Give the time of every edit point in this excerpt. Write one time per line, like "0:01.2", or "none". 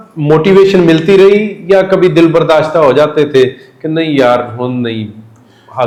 none